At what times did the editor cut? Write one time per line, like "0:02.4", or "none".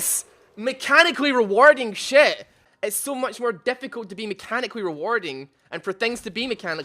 0:02.6